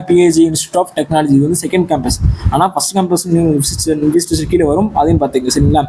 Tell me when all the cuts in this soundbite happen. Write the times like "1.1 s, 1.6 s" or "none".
none